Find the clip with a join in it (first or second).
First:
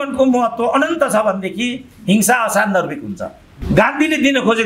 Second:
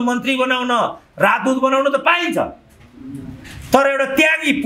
first